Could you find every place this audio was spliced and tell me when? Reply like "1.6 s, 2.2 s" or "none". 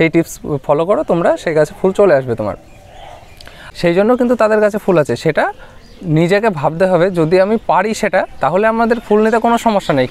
3.6 s